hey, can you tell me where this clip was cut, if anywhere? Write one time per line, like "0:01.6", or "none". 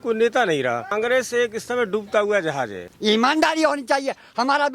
0:00.9
0:02.8